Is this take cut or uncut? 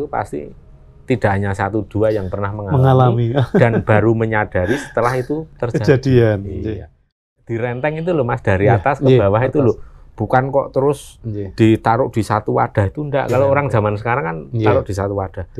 cut